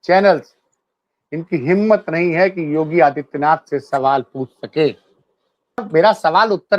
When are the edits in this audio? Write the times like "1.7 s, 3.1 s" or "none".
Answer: 5.9 s